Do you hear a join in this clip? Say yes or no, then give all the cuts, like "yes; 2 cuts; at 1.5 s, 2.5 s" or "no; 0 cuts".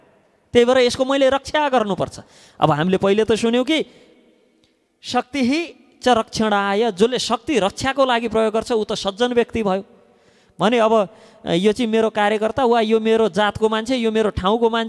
no; 0 cuts